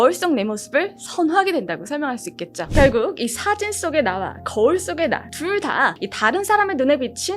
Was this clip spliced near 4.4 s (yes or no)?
no